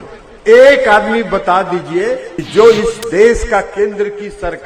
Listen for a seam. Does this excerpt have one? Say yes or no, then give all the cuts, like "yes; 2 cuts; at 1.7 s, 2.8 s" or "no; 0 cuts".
yes; 1 cut; at 2.4 s